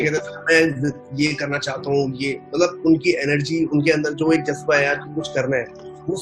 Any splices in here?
no; 0 cuts

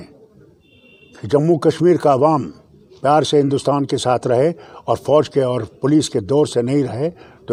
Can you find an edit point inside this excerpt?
no; 0 cuts

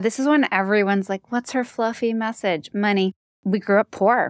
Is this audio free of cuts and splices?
no; 1 cut; at 3.4 s

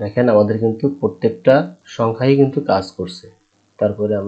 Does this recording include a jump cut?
yes; 1 cut; at 1.8 s

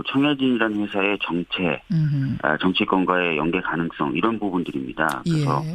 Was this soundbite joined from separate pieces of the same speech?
yes; 1 cut; at 2.2 s

